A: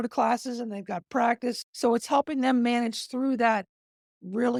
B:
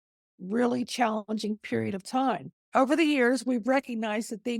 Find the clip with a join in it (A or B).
B